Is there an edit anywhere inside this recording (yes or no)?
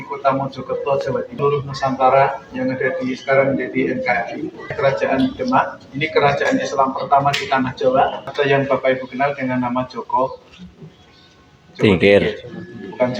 yes